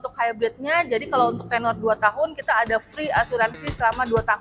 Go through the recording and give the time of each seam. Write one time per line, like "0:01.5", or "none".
none